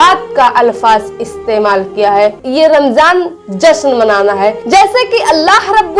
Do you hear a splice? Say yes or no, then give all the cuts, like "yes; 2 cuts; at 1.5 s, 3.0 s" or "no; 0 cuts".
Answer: yes; 1 cut; at 2.4 s